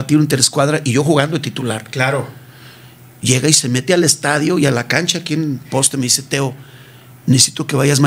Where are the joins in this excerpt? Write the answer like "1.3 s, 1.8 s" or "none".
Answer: none